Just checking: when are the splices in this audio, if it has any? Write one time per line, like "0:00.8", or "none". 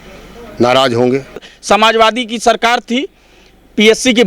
0:01.5